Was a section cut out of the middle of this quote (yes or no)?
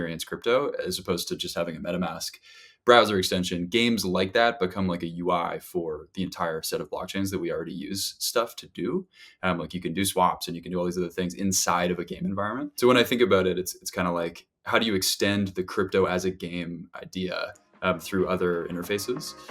yes